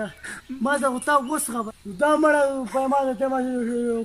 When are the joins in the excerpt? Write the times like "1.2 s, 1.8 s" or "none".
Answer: 1.6 s